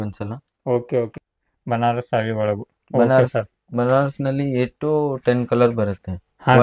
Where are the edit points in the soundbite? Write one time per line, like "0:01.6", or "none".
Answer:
0:01.1